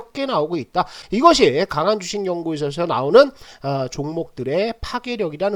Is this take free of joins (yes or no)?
yes